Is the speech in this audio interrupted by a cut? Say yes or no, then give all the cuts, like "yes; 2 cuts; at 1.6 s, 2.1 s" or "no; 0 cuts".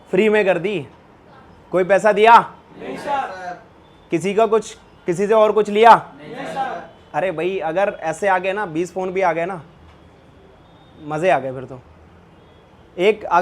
no; 0 cuts